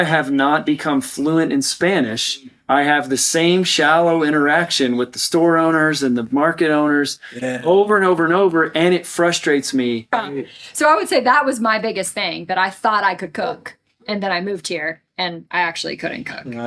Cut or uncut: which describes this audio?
cut